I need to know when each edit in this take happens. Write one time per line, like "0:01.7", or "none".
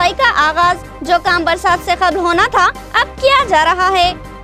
none

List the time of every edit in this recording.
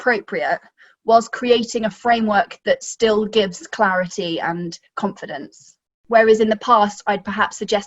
0:06.0

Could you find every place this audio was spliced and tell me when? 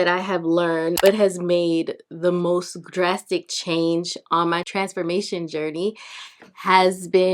0:00.9

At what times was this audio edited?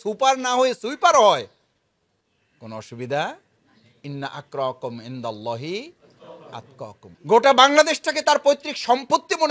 0:07.1

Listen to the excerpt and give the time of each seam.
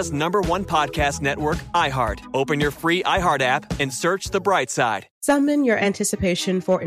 0:05.1

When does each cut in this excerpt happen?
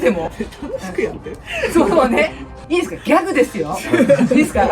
0:02.5

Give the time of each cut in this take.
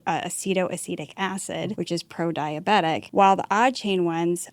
0:01.7
0:03.0

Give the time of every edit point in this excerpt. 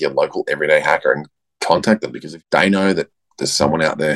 none

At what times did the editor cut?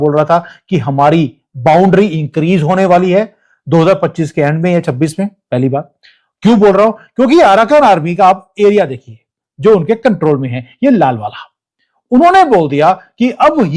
none

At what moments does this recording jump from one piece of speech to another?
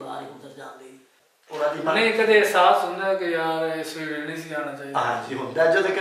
0:01.1

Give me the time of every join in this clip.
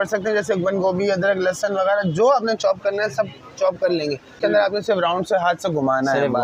0:04.4

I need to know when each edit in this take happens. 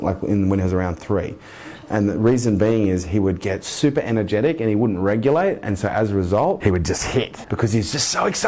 0:07.1

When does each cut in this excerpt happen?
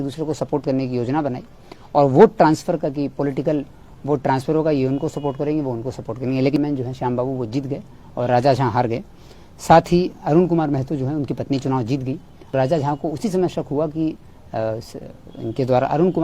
0:06.6
0:12.5

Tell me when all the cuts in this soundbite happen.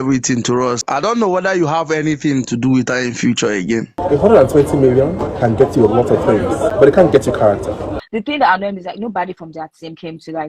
0:01.0
0:03.9
0:05.5
0:06.7
0:08.0

